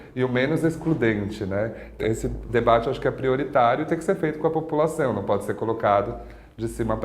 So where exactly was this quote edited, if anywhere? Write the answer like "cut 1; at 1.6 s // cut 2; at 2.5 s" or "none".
cut 1; at 1.9 s